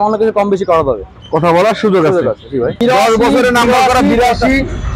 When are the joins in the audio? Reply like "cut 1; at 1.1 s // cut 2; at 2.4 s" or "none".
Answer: cut 1; at 2.8 s